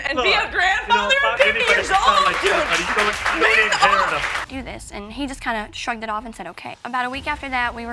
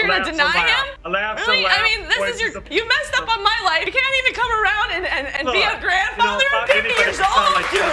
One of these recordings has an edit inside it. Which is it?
first; 1 cut; at 4.4 s

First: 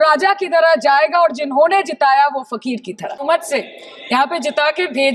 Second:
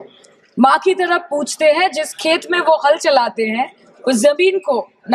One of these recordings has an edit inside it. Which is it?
first; 1 cut; at 3.2 s

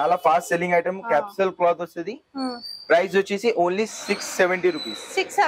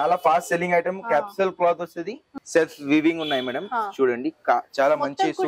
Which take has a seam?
second; 1 cut; at 2.3 s

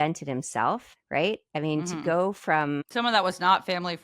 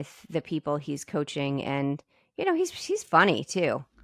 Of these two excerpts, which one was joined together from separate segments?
first; 2 cuts; at 0.9 s, 2.9 s

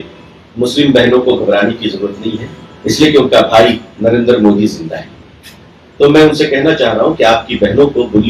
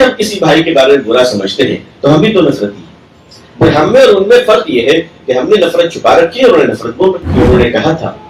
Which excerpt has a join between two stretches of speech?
second; 1 cut; at 7.3 s

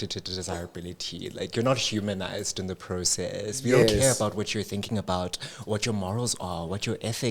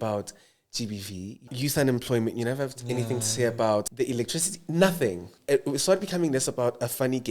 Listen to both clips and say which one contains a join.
second; 3 cuts; at 1.5 s, 3.9 s, 5.3 s

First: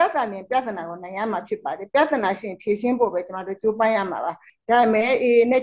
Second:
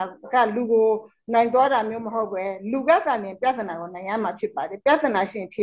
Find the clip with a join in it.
first; 1 cut; at 4.5 s

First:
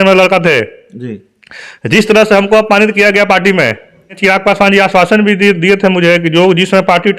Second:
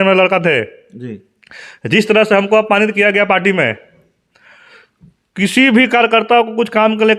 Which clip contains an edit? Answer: first; 1 cut; at 4.2 s

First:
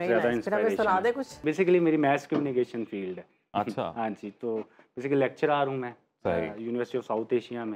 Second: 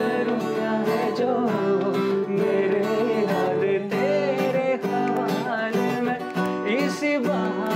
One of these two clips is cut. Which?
first; 1 cut; at 1.4 s

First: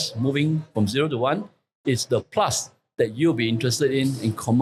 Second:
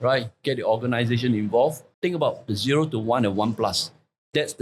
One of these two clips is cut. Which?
second; 1 cut; at 1.9 s

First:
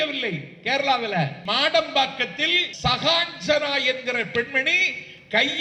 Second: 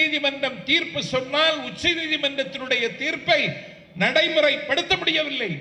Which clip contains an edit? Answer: first; 2 cuts; at 1.4 s, 2.6 s

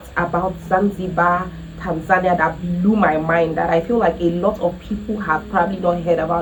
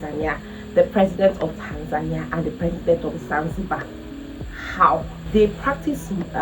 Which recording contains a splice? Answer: second; 1 cut; at 5.2 s

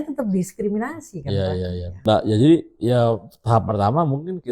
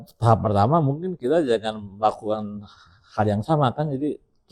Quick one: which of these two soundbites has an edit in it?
first; 1 cut; at 1.9 s

